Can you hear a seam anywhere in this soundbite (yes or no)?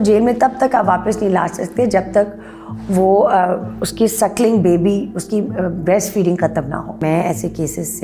yes